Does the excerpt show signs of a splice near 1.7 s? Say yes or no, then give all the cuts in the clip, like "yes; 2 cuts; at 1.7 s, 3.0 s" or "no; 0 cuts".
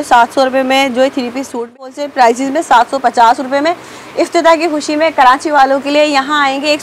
yes; 1 cut; at 1.7 s